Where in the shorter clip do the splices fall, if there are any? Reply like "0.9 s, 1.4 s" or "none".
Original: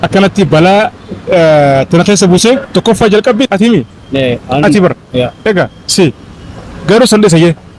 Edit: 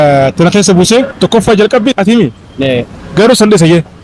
2.9 s